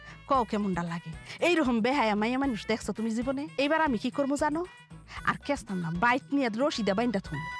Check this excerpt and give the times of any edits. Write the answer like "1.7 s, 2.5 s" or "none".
3.5 s